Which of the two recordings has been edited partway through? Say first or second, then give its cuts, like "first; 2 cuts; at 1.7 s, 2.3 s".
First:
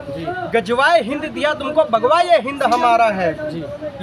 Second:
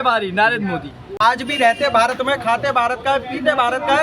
second; 1 cut; at 1.1 s